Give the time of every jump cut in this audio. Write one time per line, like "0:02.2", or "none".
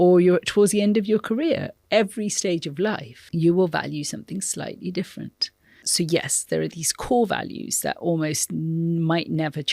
0:01.7
0:03.1
0:05.9